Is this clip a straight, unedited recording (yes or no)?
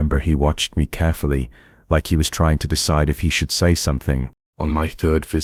yes